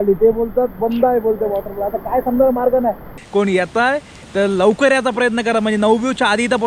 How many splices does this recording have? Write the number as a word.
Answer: one